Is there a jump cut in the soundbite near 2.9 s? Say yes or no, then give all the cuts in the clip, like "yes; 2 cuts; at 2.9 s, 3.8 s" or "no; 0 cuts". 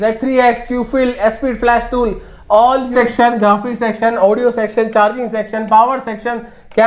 yes; 1 cut; at 2.9 s